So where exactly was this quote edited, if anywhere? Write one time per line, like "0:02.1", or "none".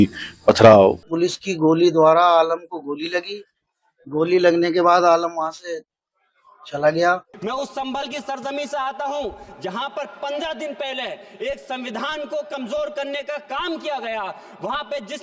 0:01.1
0:07.3